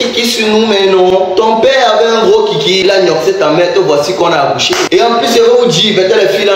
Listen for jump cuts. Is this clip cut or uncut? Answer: uncut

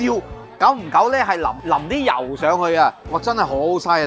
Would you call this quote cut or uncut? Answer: cut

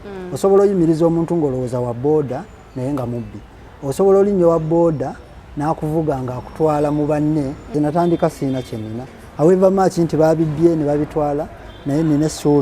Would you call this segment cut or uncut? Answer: cut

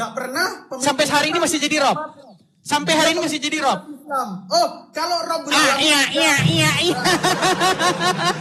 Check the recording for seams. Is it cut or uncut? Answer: uncut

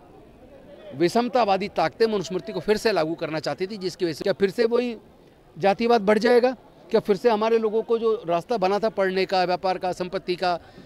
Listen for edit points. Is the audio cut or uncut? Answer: cut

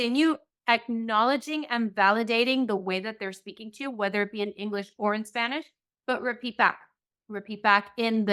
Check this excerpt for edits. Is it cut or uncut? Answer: uncut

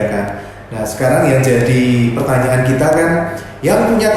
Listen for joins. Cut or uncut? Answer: uncut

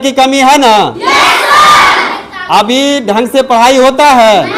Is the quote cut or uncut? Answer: uncut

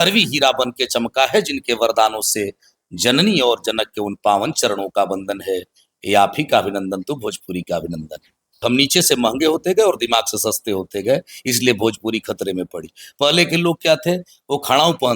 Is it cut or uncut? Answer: cut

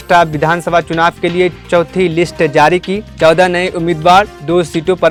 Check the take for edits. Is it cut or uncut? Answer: uncut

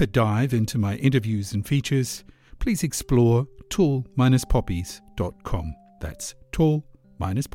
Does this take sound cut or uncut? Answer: uncut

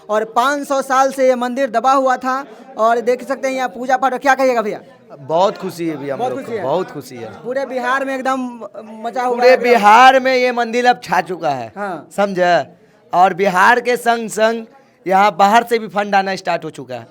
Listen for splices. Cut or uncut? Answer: uncut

